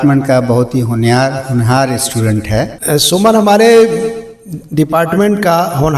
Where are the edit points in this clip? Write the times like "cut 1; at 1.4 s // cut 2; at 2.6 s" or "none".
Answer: cut 1; at 2.8 s